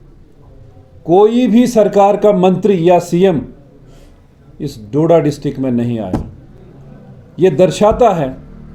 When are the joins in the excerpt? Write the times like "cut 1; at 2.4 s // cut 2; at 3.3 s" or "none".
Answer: none